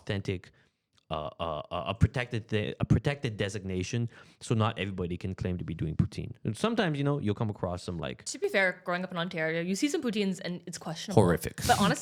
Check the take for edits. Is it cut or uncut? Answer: uncut